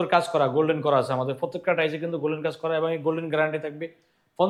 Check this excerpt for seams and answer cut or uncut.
uncut